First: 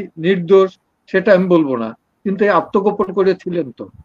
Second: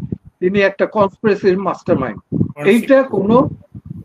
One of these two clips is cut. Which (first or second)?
second